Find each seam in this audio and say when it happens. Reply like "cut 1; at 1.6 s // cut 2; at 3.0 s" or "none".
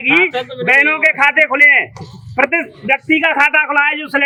none